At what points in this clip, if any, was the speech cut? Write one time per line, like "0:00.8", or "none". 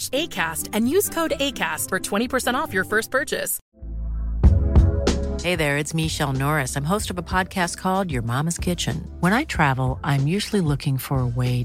0:03.5